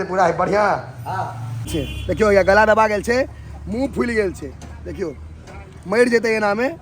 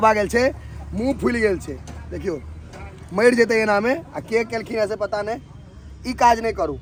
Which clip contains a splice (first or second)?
first